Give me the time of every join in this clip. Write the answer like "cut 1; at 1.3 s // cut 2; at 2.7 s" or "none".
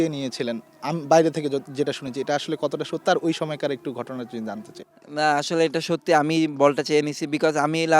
none